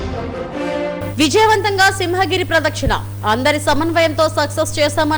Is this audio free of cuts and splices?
no; 1 cut; at 1.0 s

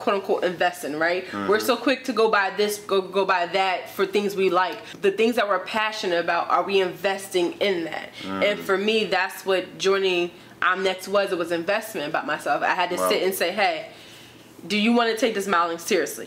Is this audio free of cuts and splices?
no; 1 cut; at 4.8 s

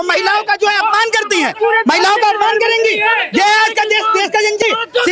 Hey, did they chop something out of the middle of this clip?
no; 0 cuts

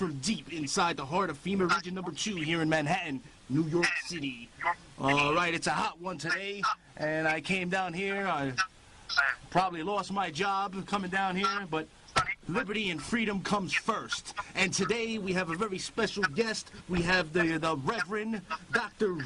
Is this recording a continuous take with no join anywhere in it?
no; 1 cut; at 4.7 s

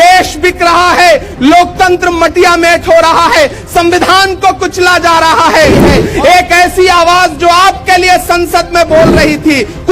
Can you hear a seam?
yes; 1 cut; at 6.0 s

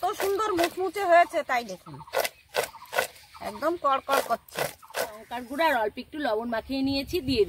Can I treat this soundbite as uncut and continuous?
no; 1 cut; at 5.3 s

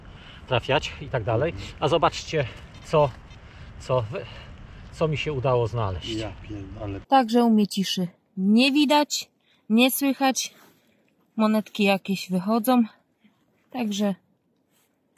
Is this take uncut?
no; 1 cut; at 7.0 s

